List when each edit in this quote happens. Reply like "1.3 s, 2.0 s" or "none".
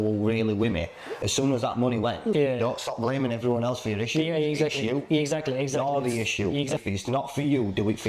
2.3 s, 6.8 s